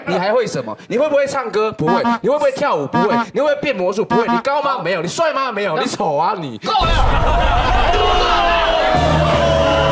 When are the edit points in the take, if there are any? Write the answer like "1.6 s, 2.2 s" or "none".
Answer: none